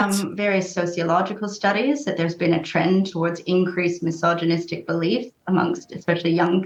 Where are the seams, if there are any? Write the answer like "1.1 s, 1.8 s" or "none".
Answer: none

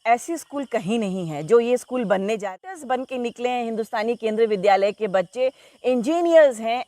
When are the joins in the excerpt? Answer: 2.5 s

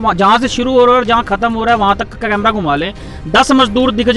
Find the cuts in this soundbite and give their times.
none

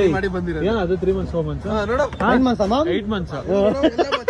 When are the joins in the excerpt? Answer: none

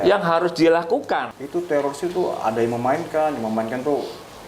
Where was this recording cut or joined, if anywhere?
1.3 s

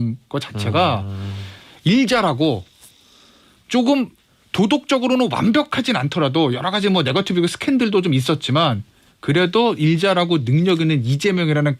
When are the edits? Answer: none

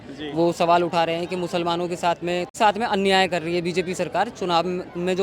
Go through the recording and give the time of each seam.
2.6 s

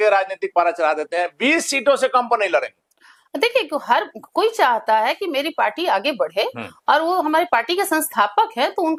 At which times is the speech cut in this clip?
none

